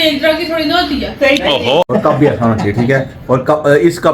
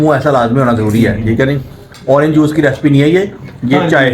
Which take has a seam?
first; 1 cut; at 1.8 s

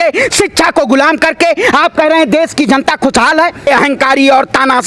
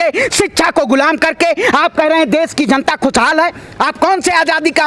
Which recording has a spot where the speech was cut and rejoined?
first; 1 cut; at 3.7 s

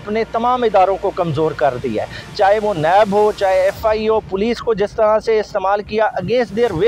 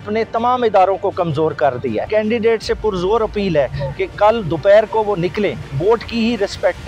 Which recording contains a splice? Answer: second; 2 cuts; at 2.1 s, 5.7 s

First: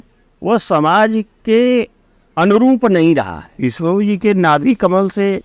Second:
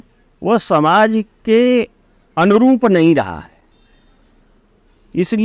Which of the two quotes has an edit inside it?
first; 1 cut; at 3.4 s

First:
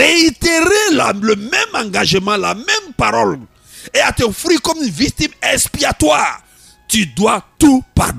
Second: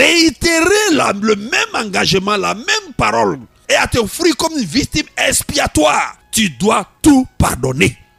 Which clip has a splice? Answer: second; 2 cuts; at 3.5 s, 6.2 s

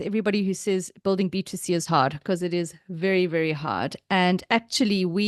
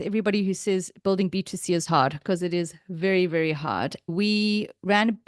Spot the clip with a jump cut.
second; 1 cut; at 4.1 s

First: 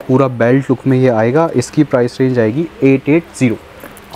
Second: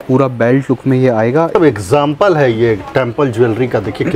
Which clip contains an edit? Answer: second; 1 cut; at 1.5 s

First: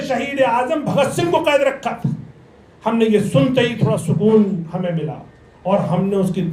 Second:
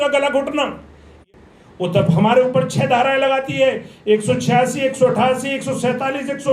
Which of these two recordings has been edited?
second; 1 cut; at 1.2 s

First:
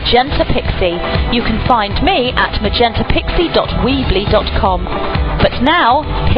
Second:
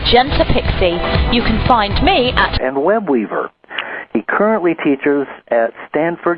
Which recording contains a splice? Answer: first; 1 cut; at 2.6 s

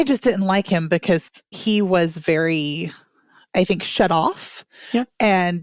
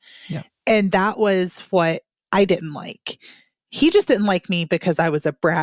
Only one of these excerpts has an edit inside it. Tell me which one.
first; 1 cut; at 1.5 s

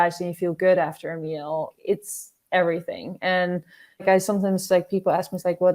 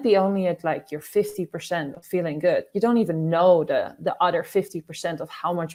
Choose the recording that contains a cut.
first; 2 cuts; at 1.7 s, 4.0 s

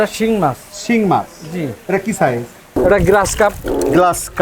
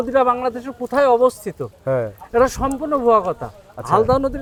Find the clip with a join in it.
first; 1 cut; at 2.6 s

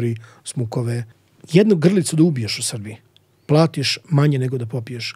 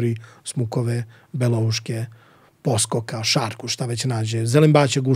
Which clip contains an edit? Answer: first; 1 cut; at 1.2 s

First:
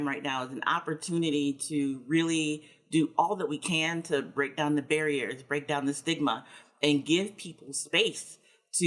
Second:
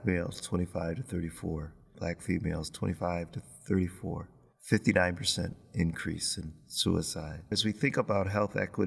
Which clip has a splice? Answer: second; 2 cuts; at 1.9 s, 7.6 s

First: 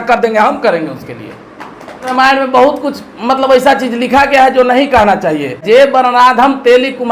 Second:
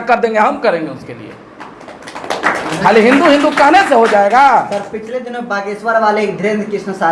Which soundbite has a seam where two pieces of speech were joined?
first; 1 cut; at 2.0 s

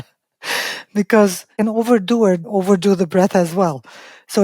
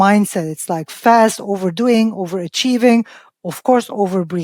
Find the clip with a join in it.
first; 2 cuts; at 1.5 s, 2.4 s

